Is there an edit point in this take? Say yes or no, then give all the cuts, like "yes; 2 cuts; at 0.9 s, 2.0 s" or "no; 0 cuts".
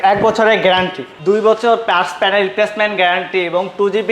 yes; 1 cut; at 1.0 s